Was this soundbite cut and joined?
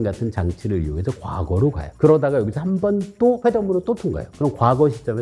yes; 2 cuts; at 1.9 s, 3.4 s

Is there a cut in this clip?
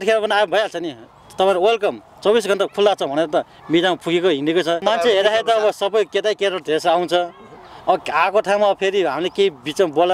yes; 1 cut; at 4.8 s

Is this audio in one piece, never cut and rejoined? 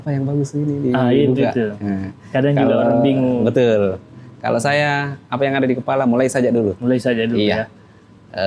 yes; 0 cuts

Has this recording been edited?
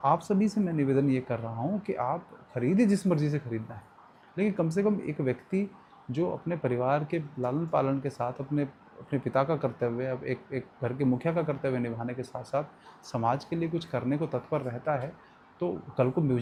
no; 0 cuts

